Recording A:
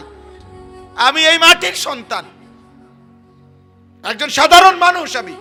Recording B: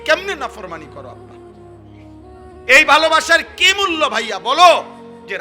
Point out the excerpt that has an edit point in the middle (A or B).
B